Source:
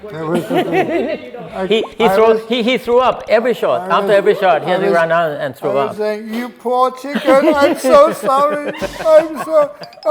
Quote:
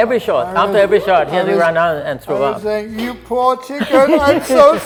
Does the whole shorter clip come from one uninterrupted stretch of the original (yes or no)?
yes